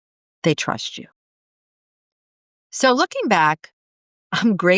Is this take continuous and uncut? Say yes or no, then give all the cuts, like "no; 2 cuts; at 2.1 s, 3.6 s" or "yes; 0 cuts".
yes; 0 cuts